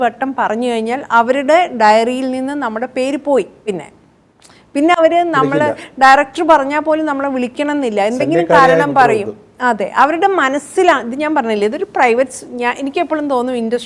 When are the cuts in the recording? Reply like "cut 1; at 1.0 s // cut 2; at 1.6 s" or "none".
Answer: none

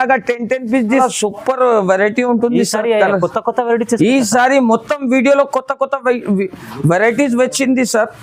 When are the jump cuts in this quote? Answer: cut 1; at 0.9 s

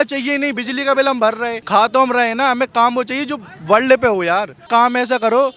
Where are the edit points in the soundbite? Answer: cut 1; at 1.6 s // cut 2; at 4.6 s

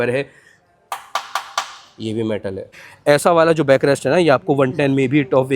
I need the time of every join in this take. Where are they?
cut 1; at 2.9 s

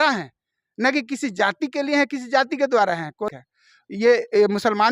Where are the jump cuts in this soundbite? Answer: cut 1; at 3.2 s

